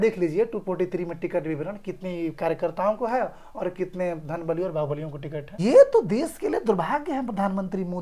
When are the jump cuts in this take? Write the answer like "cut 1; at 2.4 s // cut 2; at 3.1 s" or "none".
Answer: cut 1; at 5.6 s

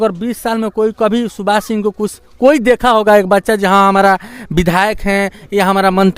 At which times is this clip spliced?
none

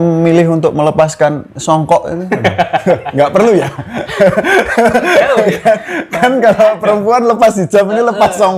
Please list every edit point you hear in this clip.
none

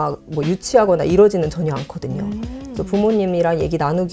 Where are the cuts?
none

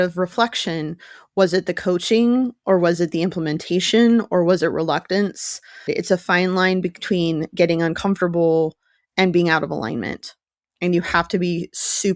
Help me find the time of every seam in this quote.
cut 1; at 5.9 s

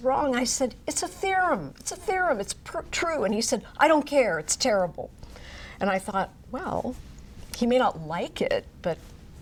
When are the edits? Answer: none

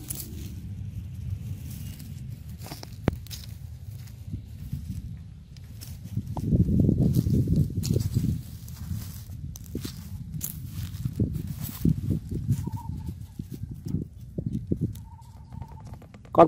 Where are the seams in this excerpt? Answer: none

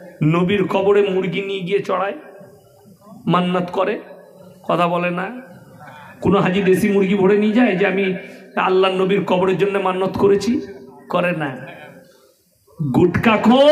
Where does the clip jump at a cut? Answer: none

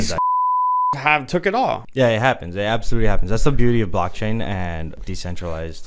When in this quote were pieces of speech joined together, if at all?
cut 1; at 1.8 s // cut 2; at 5.0 s

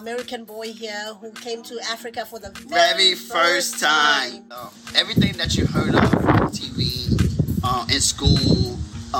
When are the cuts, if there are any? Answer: cut 1; at 4.4 s

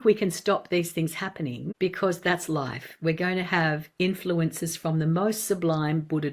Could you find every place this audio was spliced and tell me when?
cut 1; at 1.6 s

